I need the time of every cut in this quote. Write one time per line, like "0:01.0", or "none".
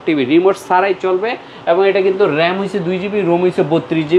none